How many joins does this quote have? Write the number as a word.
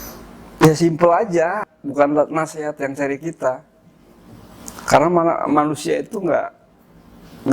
one